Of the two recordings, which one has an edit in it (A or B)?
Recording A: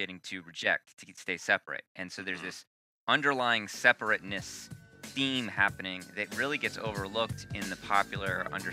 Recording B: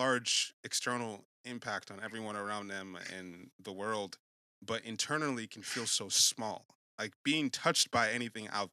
B